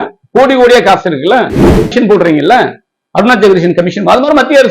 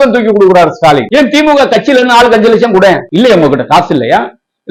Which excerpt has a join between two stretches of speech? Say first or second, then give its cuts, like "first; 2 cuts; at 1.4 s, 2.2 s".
first; 1 cut; at 1.6 s